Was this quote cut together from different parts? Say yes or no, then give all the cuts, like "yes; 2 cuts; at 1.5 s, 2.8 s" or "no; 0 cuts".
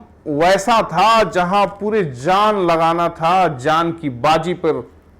no; 0 cuts